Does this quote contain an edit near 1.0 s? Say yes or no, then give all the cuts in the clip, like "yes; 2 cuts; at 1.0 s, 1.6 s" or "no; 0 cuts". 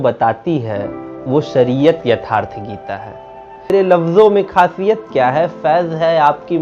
no; 1 cut; at 3.7 s